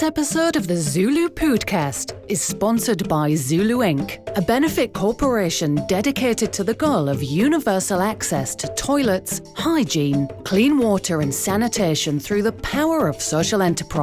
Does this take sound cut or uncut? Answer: uncut